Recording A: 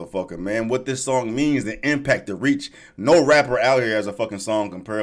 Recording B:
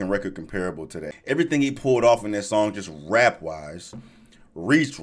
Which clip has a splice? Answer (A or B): B